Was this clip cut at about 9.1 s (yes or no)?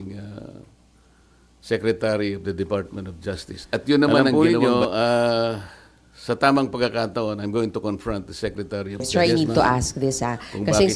yes